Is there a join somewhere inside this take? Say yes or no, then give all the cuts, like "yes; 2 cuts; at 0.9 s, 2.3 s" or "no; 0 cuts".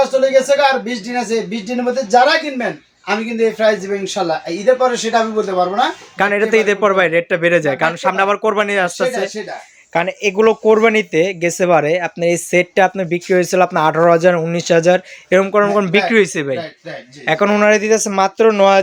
no; 0 cuts